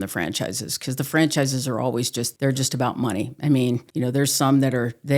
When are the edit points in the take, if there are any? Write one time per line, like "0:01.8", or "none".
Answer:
0:02.2
0:03.9